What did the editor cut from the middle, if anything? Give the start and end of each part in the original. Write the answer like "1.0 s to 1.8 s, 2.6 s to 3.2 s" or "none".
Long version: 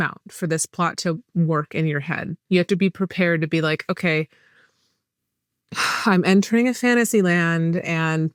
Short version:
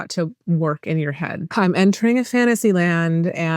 2.4 s to 6.0 s